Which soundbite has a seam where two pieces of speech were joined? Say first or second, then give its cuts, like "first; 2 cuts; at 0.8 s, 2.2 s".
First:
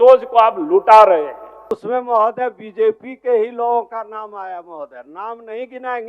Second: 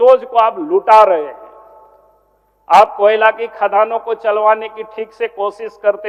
first; 1 cut; at 1.7 s